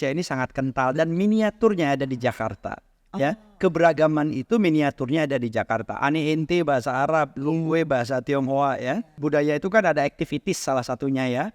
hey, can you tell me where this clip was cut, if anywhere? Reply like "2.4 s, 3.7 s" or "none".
9.1 s